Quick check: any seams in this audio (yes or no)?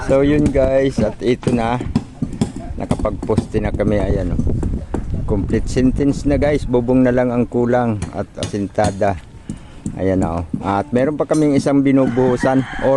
no